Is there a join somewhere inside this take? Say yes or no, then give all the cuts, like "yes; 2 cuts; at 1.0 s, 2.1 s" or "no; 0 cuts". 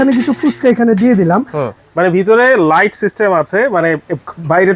yes; 1 cut; at 1.7 s